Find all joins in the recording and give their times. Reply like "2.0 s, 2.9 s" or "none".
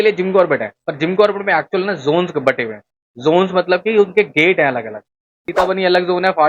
5.5 s